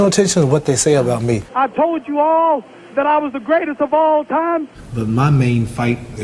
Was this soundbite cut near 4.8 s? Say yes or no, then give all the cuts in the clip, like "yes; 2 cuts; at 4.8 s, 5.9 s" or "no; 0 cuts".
yes; 2 cuts; at 1.5 s, 4.8 s